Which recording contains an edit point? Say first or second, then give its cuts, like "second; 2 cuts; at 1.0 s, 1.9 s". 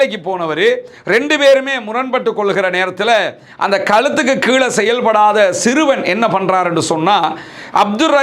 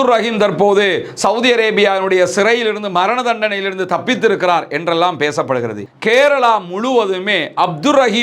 second; 1 cut; at 5.8 s